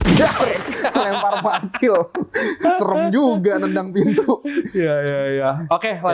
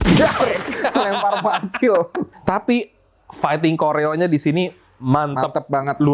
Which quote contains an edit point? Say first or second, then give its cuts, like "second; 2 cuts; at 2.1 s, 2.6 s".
second; 1 cut; at 2.2 s